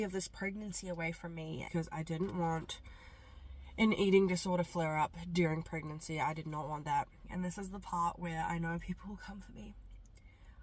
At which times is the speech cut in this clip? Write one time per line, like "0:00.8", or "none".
0:01.7
0:07.2